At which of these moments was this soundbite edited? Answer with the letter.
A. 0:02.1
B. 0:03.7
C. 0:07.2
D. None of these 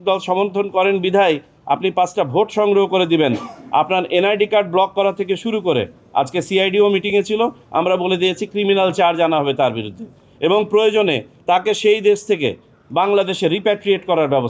D